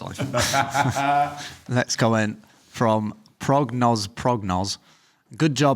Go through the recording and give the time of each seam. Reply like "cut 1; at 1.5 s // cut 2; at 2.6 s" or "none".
none